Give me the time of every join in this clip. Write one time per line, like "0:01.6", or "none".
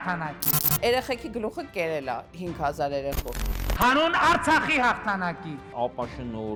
none